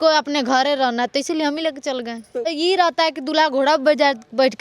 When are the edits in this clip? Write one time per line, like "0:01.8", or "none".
0:02.5